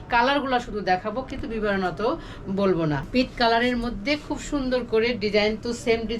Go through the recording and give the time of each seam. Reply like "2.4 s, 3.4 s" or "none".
3.0 s